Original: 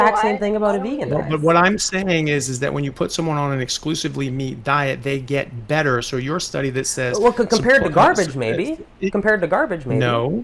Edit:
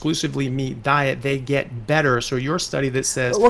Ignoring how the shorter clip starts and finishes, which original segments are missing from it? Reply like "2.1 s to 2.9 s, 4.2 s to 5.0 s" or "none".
none